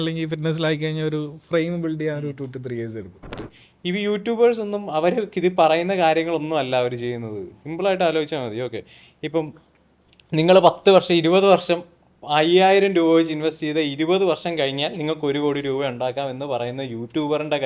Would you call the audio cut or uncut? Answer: cut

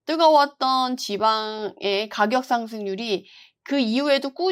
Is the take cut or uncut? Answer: uncut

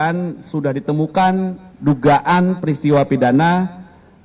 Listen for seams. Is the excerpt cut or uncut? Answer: uncut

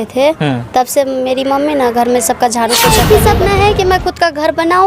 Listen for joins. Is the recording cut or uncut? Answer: cut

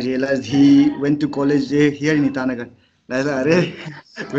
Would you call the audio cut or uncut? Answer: uncut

